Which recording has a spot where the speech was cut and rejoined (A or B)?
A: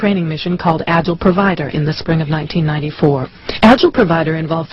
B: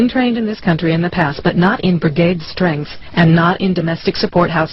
A